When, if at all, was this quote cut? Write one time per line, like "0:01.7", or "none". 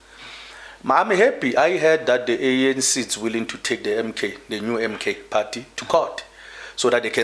none